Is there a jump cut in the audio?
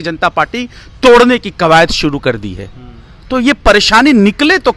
no; 0 cuts

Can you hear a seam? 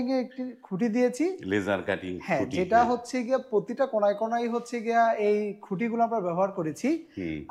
no; 0 cuts

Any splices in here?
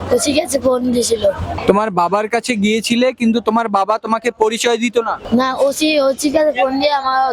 yes; 2 cuts; at 1.6 s, 5.2 s

